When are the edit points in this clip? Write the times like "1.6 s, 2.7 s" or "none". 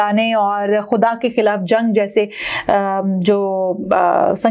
none